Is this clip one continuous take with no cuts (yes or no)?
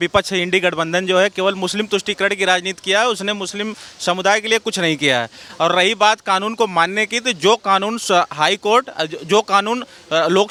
yes